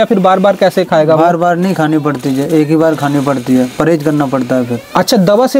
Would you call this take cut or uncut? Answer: uncut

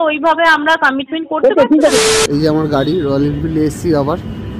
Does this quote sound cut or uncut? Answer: cut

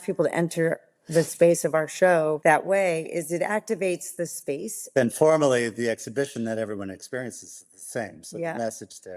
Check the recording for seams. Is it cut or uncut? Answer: cut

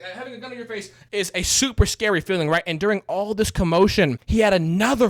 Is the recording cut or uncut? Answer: cut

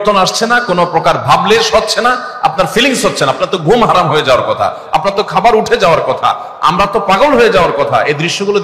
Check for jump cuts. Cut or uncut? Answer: uncut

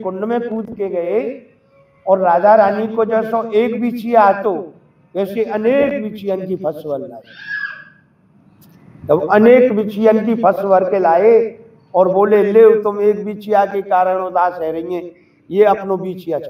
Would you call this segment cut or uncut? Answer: uncut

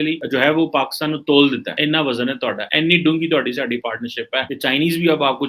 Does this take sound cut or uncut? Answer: cut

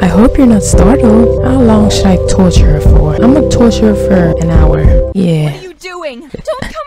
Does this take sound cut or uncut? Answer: cut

